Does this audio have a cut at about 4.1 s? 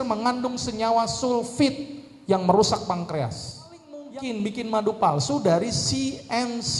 yes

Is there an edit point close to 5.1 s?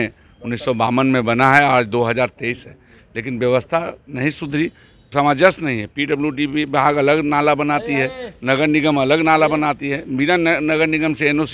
yes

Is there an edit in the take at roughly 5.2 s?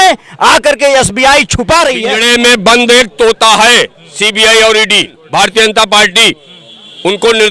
yes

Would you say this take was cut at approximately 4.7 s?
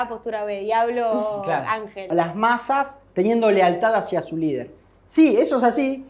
no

